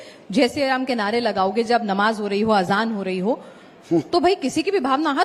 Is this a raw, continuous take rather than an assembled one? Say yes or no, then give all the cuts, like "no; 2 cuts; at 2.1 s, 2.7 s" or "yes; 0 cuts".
yes; 0 cuts